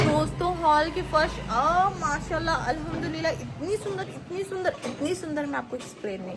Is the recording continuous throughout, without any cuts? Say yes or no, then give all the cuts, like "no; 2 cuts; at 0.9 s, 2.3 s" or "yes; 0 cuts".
yes; 0 cuts